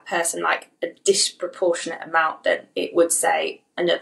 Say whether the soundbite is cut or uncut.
uncut